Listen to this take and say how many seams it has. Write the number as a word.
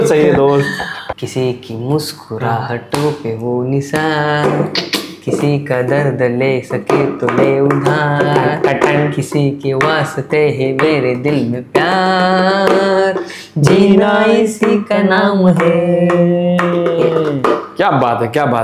one